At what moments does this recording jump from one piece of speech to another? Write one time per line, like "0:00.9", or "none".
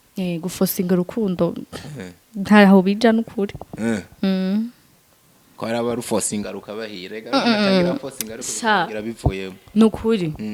none